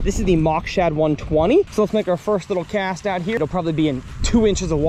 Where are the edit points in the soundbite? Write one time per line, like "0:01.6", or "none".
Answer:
0:01.7
0:03.4